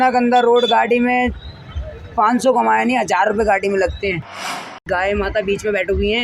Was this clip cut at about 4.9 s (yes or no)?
yes